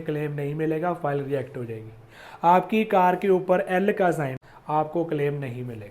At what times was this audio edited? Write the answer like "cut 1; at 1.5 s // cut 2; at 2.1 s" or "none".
cut 1; at 4.4 s